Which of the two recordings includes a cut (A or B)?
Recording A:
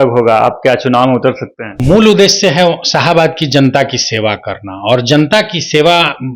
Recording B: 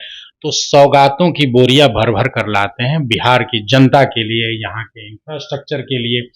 A